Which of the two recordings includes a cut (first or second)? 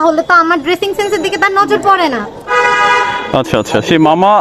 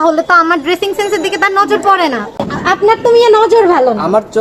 second